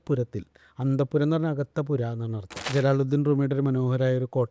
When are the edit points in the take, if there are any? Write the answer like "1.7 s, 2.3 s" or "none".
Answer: 2.5 s